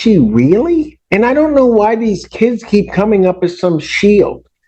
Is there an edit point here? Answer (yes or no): yes